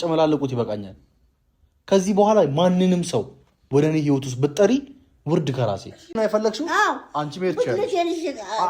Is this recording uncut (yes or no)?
no